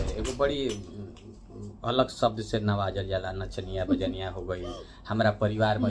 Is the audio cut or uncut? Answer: uncut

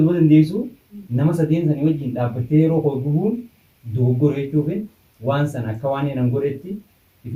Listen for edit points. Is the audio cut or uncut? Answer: uncut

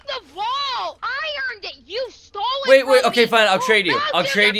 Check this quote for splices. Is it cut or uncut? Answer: cut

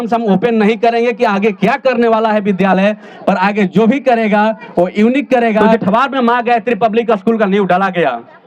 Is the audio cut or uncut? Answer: cut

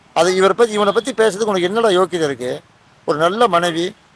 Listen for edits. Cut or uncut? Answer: uncut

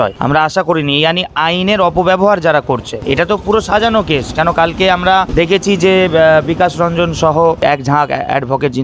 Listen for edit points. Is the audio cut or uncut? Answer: uncut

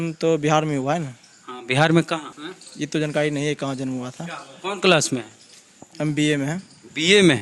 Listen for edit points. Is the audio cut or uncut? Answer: cut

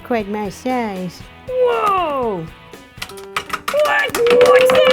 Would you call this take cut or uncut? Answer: cut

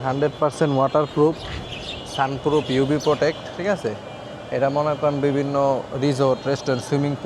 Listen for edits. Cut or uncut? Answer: uncut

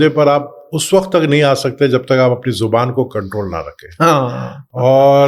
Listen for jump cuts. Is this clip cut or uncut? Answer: uncut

